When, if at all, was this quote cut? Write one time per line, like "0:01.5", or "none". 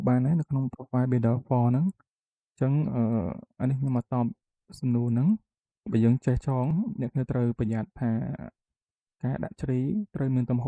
0:06.7